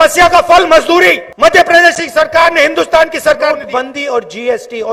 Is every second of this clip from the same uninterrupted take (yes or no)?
no